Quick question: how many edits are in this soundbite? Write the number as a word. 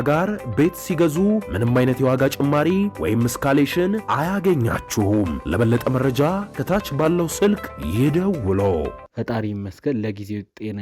one